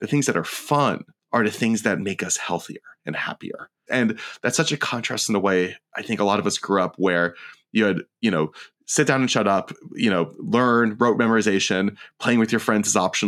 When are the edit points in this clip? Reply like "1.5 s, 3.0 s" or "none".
1.1 s, 3.6 s